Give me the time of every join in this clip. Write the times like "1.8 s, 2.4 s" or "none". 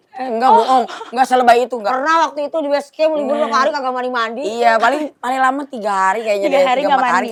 none